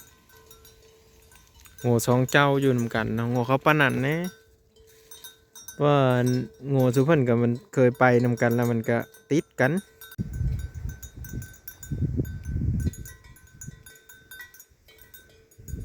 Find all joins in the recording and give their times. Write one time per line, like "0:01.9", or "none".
0:10.1